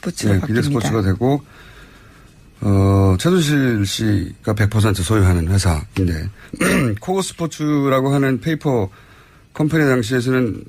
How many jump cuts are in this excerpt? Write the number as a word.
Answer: one